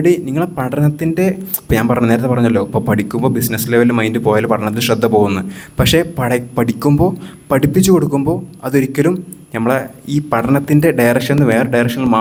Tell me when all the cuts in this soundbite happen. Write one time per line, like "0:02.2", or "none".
none